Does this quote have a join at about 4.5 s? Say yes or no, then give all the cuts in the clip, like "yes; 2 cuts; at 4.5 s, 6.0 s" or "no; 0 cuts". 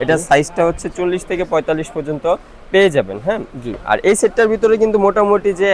no; 0 cuts